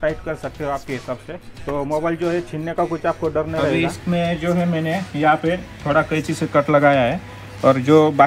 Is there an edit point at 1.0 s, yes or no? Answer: no